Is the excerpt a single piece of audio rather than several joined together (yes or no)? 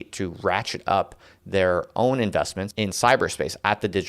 no